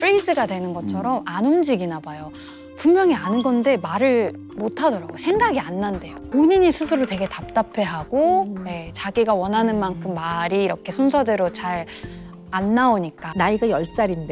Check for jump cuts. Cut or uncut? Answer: cut